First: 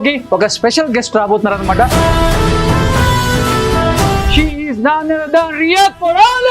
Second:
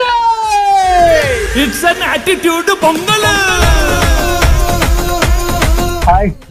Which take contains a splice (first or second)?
first